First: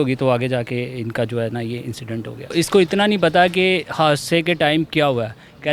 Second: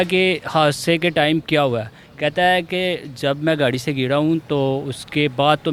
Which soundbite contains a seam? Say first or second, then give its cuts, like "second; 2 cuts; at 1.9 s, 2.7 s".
first; 1 cut; at 2.5 s